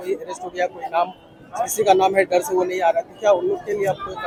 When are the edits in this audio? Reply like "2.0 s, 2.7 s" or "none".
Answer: none